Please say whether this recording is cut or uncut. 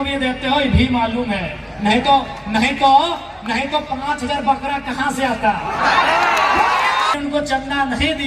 cut